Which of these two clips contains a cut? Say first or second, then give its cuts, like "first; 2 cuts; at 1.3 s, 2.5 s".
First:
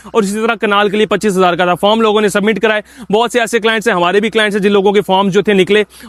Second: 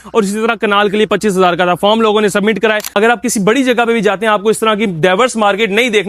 second; 1 cut; at 2.9 s